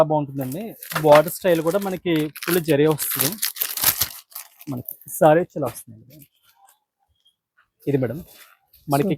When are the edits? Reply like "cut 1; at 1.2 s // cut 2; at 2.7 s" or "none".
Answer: none